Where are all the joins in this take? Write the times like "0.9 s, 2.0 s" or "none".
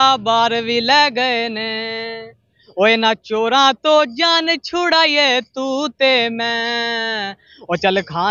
none